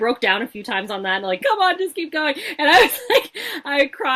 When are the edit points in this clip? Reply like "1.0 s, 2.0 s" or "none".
1.4 s